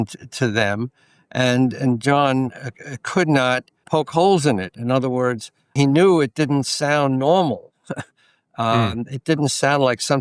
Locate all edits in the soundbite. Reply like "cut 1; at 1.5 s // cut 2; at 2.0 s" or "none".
cut 1; at 3.8 s // cut 2; at 5.6 s